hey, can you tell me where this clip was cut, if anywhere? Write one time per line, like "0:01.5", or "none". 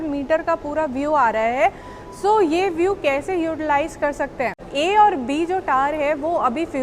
0:04.7